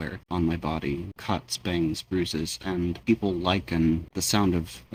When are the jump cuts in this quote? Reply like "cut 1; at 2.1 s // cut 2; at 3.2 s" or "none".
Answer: none

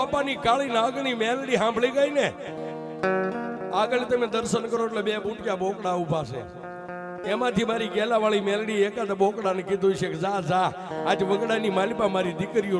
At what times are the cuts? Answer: none

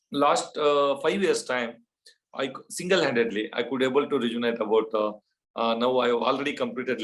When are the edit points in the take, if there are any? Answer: none

